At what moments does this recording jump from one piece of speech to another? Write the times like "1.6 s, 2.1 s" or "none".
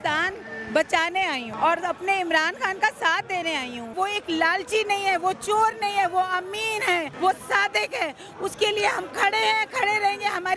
1.5 s, 3.9 s, 7.1 s